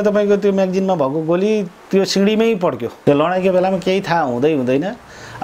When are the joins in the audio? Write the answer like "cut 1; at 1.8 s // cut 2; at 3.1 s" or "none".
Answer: cut 1; at 2.9 s